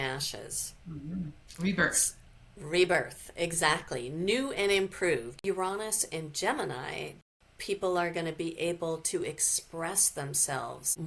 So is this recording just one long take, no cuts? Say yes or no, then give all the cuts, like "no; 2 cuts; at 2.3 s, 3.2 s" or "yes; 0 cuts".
no; 2 cuts; at 5.4 s, 7.3 s